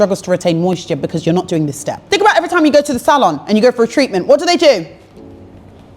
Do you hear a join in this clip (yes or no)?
yes